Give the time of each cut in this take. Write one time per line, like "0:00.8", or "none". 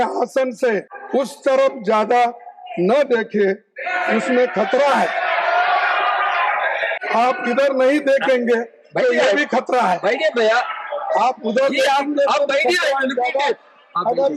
0:00.9
0:06.9